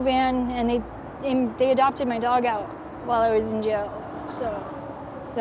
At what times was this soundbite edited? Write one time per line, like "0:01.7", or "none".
none